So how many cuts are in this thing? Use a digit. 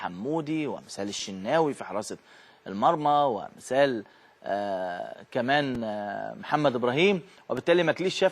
1